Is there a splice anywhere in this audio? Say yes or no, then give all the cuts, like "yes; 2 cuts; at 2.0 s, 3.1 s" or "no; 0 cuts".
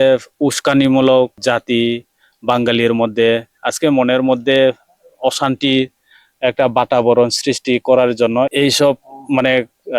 yes; 3 cuts; at 1.4 s, 3.6 s, 8.5 s